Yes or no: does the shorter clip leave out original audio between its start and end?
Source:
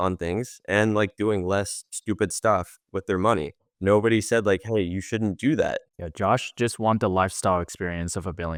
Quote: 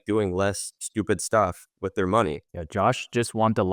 yes